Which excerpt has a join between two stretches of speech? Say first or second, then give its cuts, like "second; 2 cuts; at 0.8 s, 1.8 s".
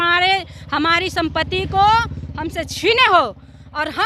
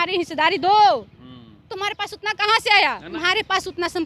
second; 1 cut; at 3.1 s